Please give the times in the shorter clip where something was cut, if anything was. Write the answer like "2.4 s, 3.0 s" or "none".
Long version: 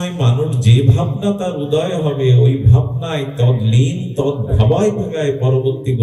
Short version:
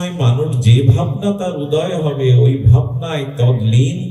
none